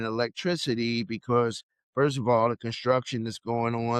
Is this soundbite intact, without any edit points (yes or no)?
yes